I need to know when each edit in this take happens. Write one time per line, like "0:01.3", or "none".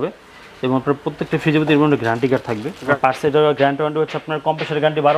0:03.0